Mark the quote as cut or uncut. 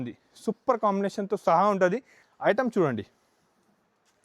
cut